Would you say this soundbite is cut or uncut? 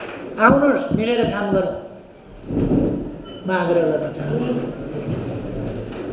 uncut